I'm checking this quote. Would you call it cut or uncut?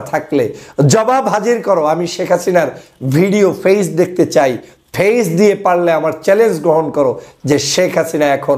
uncut